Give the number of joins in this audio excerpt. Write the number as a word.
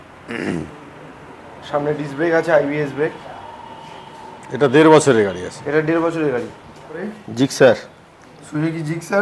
one